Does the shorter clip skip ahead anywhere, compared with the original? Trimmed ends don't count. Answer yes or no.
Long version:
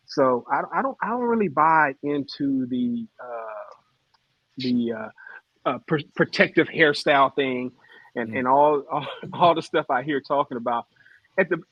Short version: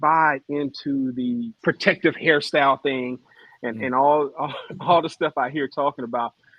yes